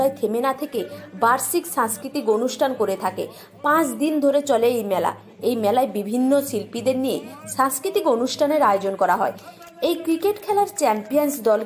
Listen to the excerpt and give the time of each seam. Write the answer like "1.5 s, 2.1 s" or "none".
none